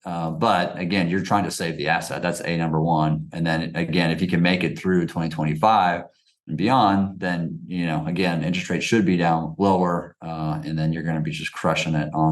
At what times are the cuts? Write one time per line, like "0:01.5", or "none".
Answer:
none